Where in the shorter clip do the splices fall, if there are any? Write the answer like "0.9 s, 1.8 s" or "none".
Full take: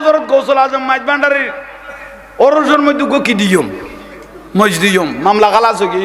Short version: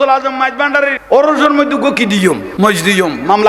1.0 s, 2.5 s